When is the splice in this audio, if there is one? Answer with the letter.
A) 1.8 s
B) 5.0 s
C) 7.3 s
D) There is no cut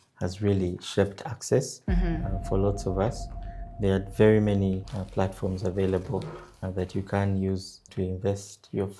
D